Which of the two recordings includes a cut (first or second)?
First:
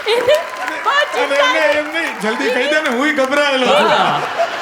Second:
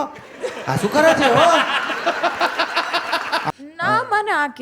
second